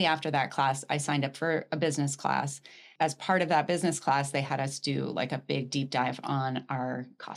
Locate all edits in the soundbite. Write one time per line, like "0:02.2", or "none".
0:02.8